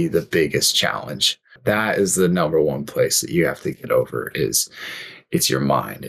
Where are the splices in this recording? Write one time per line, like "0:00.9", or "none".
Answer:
0:01.6